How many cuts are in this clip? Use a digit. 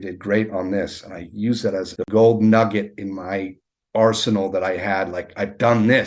1